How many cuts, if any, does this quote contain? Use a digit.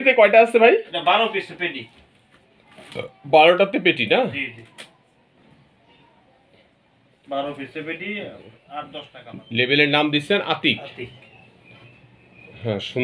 1